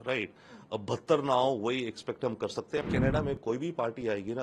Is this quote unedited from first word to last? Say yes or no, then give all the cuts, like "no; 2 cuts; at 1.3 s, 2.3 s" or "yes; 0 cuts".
no; 1 cut; at 2.8 s